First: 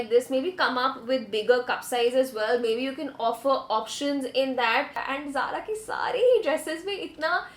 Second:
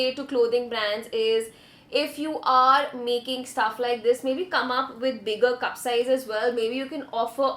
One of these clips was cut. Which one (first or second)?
first